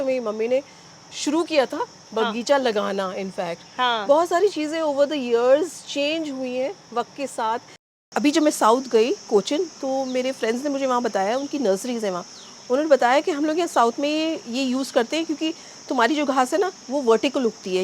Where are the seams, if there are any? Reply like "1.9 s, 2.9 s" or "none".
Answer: 7.9 s